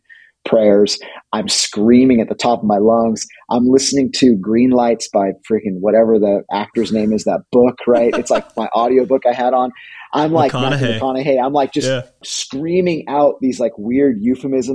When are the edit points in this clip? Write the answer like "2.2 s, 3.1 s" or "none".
12.2 s